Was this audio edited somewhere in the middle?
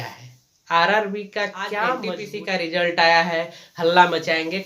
yes; 1 cut; at 2.1 s

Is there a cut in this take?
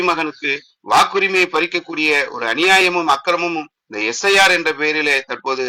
no; 0 cuts

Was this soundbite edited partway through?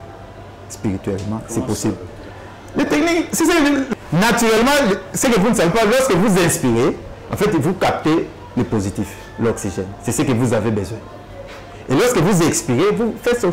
no; 0 cuts

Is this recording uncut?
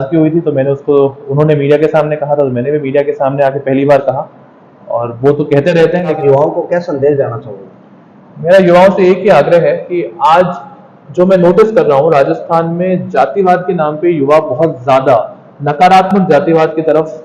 no; 1 cut; at 6.2 s

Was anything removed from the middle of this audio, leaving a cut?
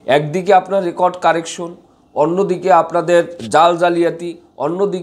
no; 0 cuts

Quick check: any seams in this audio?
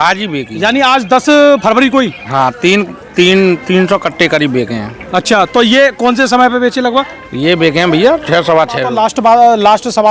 yes; 1 cut; at 8.9 s

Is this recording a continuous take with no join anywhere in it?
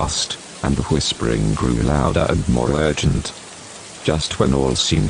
yes; 0 cuts

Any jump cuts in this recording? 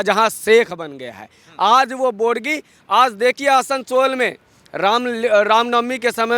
no; 0 cuts

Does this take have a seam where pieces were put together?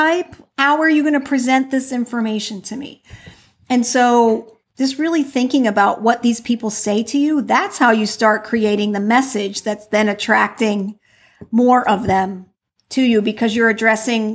no; 0 cuts

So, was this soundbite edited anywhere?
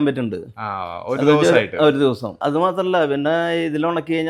yes; 1 cut; at 2.3 s

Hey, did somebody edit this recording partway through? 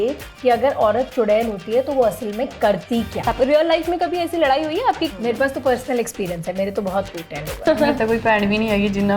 yes; 3 cuts; at 3.2 s, 5.1 s, 7.7 s

